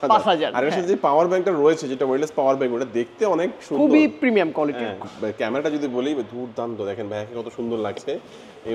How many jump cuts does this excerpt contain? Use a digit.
1